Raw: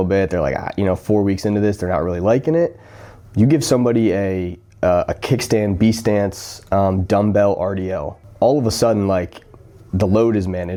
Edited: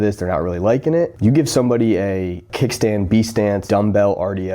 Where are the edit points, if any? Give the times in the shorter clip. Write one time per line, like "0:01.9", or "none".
0:01.1
0:02.5
0:03.6